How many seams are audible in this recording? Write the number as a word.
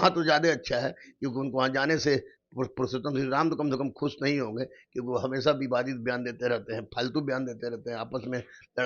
zero